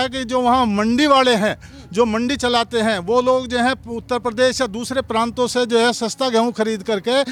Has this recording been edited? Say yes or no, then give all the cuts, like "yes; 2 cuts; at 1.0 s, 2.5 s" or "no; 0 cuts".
no; 0 cuts